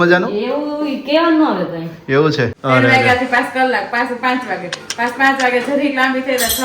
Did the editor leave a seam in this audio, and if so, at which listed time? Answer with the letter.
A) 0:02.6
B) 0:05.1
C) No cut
A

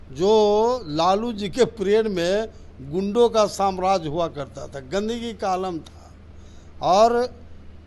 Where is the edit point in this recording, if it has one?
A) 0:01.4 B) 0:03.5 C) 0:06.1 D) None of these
D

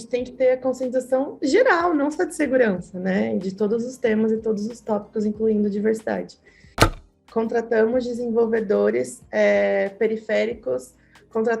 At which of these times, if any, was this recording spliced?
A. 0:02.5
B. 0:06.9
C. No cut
B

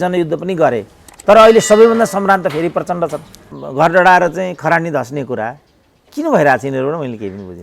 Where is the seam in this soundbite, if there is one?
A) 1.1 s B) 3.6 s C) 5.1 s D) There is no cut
B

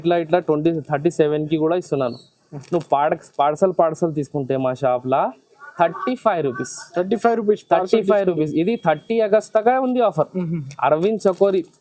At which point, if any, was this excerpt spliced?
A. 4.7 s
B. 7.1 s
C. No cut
C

